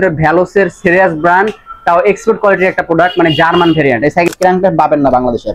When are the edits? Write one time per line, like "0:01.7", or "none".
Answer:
0:04.3